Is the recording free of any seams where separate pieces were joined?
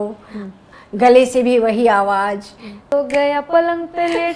no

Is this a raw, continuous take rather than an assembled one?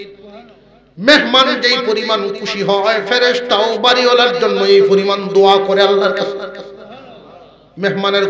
yes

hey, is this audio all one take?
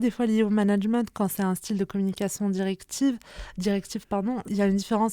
yes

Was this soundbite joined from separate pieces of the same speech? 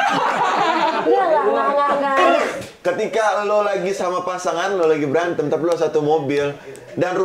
yes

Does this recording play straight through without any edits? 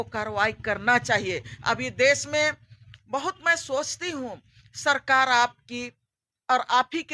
yes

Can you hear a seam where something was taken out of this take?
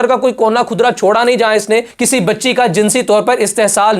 yes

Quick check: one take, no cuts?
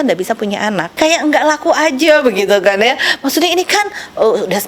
no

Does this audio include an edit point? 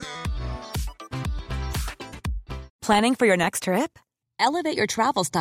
yes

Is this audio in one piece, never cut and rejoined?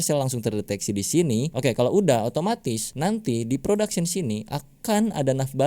no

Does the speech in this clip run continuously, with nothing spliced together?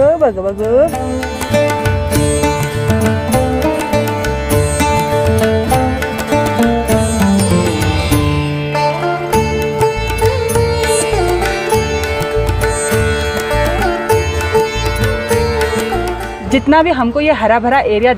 yes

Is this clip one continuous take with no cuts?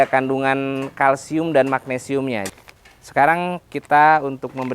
no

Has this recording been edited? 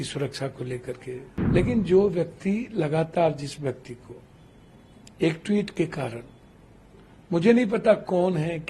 yes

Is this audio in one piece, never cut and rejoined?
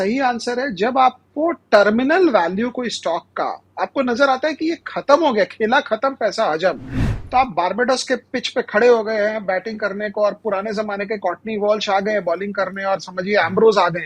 no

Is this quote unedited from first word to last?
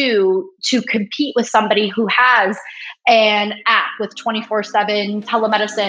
yes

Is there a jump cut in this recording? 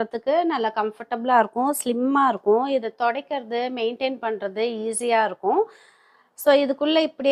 no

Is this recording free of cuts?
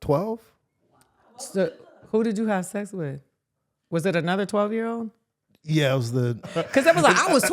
no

